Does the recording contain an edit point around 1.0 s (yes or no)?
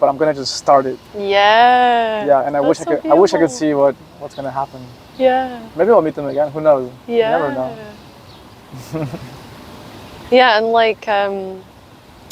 no